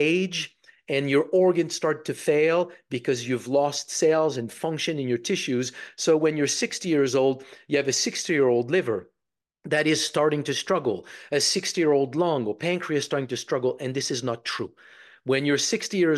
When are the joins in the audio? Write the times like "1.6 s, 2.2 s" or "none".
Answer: none